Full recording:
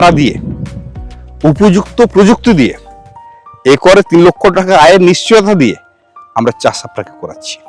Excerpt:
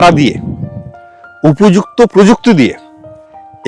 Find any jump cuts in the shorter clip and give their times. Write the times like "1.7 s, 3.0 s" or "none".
none